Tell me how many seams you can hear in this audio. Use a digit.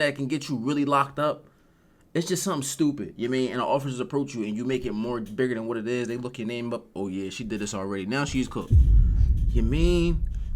0